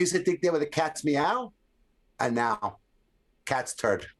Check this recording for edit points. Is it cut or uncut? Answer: uncut